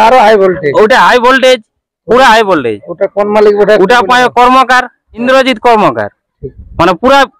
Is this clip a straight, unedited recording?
no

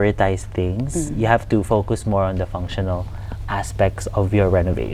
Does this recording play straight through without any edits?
yes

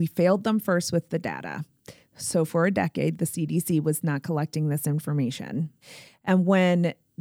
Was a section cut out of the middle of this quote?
yes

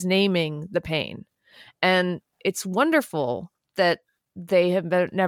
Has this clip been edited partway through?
no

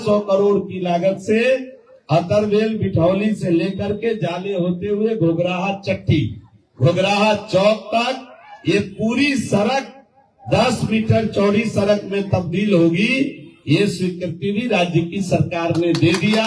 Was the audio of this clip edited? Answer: no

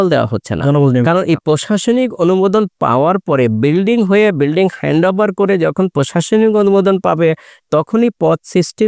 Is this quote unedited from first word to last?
yes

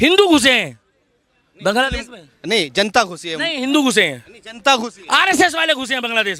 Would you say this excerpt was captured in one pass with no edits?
yes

